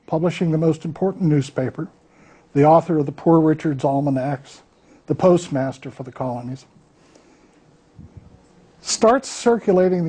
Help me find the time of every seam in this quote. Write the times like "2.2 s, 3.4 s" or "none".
4.5 s